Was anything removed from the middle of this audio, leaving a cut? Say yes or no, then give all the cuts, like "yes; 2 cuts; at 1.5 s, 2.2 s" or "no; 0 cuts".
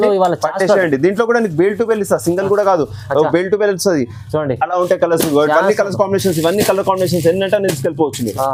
no; 0 cuts